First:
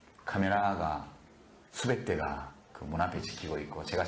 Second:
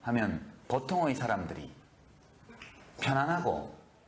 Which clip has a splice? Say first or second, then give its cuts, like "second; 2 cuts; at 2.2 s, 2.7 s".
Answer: second; 1 cut; at 2.5 s